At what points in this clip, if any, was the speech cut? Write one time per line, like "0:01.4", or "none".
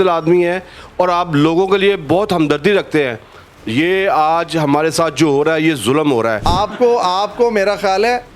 0:06.4